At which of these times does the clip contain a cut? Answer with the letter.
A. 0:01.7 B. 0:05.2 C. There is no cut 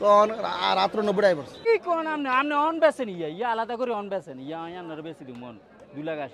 A